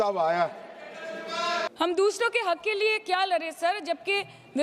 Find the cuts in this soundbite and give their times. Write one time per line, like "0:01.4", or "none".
0:01.7